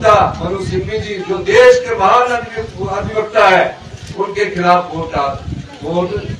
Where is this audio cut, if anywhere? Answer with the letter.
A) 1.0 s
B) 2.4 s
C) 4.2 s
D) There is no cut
D